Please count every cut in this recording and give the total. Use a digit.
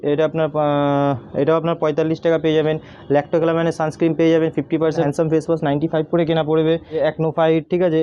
2